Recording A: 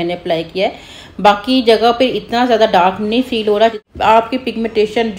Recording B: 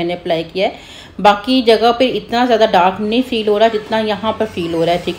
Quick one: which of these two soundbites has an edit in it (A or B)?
A